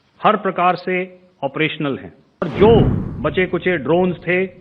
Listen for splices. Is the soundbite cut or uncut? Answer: cut